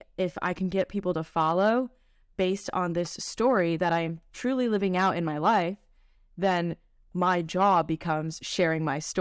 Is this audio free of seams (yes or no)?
yes